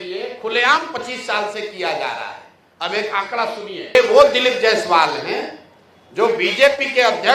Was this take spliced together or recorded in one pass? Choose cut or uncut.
cut